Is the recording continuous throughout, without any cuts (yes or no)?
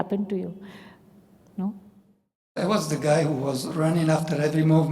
no